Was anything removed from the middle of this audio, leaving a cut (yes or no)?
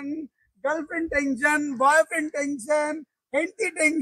no